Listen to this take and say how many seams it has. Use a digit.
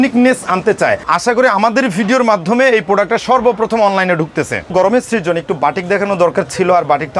2